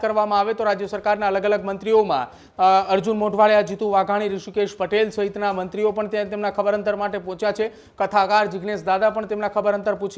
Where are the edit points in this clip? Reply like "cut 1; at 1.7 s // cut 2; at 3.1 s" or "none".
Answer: none